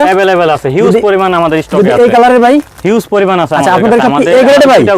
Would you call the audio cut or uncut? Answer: uncut